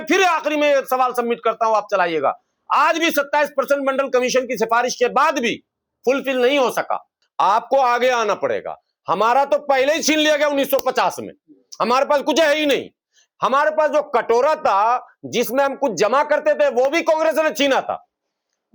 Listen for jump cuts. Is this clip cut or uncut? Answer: cut